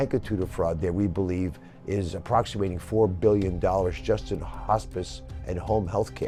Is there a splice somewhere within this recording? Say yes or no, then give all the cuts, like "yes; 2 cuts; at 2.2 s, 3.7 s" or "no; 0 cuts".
no; 0 cuts